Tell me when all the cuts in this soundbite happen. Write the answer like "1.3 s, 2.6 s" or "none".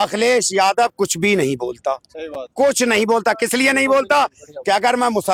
none